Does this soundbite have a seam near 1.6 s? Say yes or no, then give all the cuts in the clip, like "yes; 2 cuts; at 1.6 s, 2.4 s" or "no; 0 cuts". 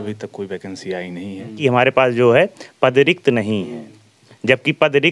yes; 1 cut; at 1.6 s